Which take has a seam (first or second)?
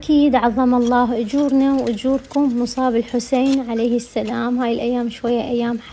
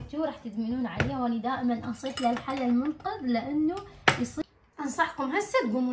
second